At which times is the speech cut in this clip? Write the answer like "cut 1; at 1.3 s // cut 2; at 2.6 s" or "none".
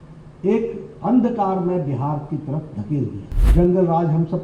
cut 1; at 3.3 s